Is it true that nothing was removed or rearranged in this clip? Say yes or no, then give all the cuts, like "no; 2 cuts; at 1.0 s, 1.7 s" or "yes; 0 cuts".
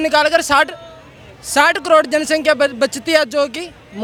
yes; 0 cuts